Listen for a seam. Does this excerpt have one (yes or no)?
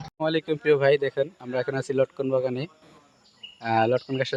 no